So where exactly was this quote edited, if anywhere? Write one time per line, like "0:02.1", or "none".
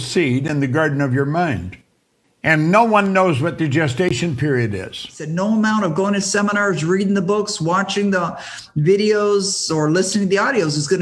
0:05.2